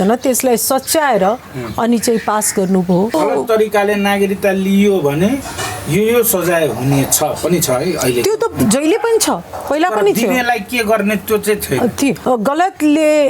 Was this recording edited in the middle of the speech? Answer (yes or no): yes